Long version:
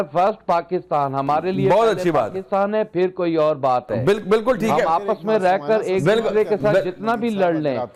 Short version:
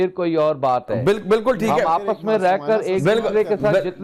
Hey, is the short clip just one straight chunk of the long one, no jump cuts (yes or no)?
yes